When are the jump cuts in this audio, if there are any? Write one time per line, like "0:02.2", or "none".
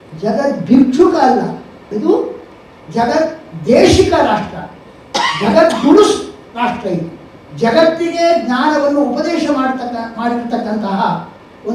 0:01.9

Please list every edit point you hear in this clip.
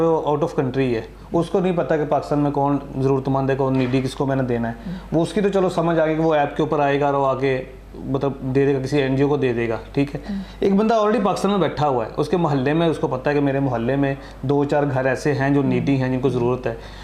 none

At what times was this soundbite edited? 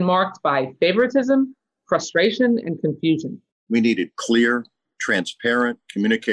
0:03.6

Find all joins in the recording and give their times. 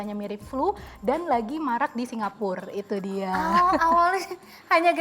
none

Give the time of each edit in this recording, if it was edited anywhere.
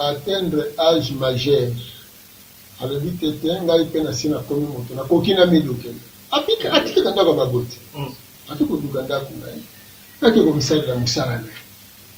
none

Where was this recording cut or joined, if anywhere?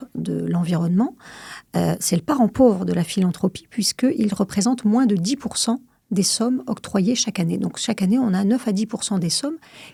none

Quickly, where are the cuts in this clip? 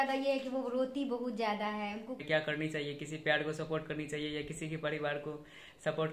0:02.2

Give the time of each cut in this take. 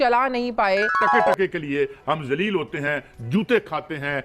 0:01.0

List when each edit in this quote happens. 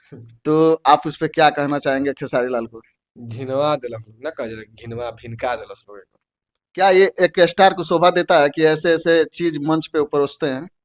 none

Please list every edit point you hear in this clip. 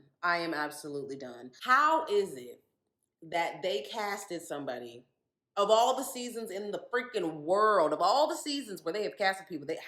none

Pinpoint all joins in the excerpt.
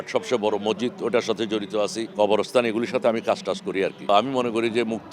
0:02.0
0:04.1

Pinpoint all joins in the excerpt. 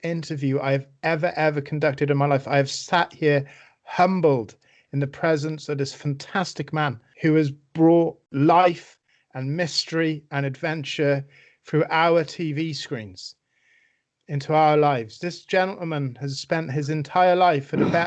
0:07.1
0:08.2

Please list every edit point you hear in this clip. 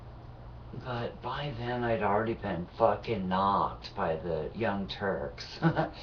0:04.1

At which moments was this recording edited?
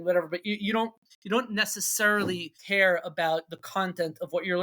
0:01.1
0:02.5

